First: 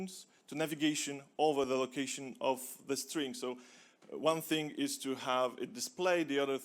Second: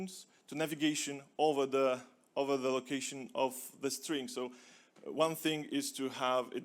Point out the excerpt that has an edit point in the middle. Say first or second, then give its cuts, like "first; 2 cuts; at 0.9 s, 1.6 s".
first; 1 cut; at 1.7 s